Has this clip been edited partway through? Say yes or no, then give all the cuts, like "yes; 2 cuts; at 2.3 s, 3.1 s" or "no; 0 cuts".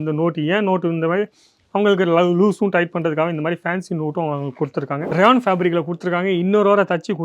yes; 1 cut; at 5.1 s